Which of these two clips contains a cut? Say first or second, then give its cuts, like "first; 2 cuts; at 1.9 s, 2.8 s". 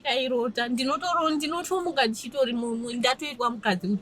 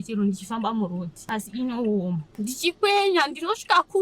second; 2 cuts; at 1.1 s, 2.3 s